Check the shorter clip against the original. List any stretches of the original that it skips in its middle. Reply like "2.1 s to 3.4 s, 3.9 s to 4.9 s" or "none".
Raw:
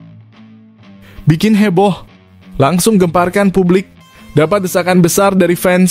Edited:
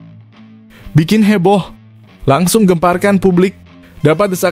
0.9 s to 1.2 s